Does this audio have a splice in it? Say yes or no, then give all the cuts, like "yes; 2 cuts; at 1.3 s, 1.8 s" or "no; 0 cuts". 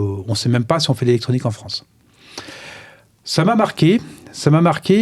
no; 0 cuts